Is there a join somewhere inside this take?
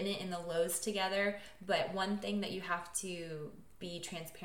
no; 0 cuts

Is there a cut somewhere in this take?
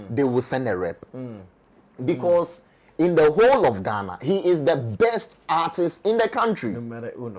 no; 0 cuts

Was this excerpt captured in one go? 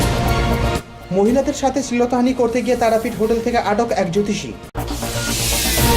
no; 2 cuts; at 1.0 s, 4.7 s

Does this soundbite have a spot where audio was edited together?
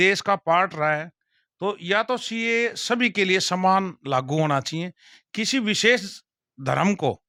no; 0 cuts

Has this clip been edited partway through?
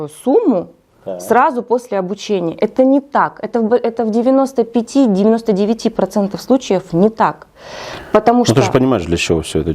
no; 0 cuts

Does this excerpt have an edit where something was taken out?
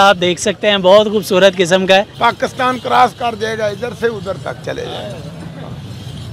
yes; 1 cut; at 2.1 s

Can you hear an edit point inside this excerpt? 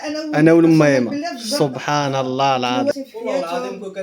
yes; 1 cut; at 2.9 s

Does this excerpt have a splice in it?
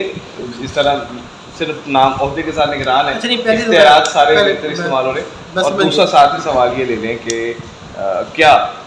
no; 0 cuts

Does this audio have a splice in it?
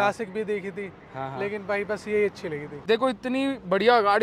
yes; 1 cut; at 2.8 s

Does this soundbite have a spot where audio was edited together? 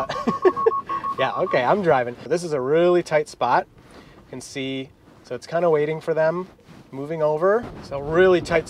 yes; 2 cuts; at 2.2 s, 7.8 s

